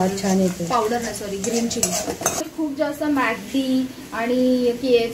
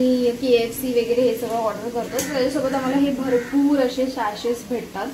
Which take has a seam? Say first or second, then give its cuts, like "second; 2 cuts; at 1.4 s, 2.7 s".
first; 1 cut; at 2.5 s